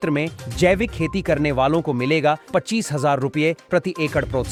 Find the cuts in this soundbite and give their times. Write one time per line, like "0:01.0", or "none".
none